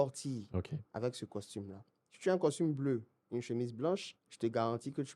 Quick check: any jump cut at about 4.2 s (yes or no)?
yes